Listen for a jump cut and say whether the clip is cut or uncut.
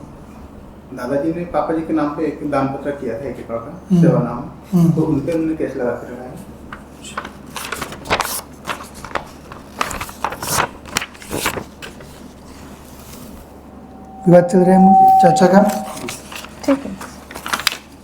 uncut